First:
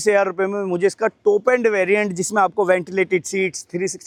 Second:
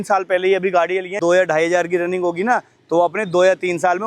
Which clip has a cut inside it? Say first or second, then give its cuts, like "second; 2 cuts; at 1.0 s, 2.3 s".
second; 1 cut; at 1.2 s